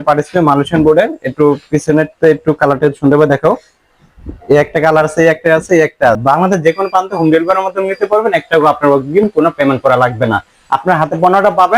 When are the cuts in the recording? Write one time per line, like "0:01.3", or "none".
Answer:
0:06.2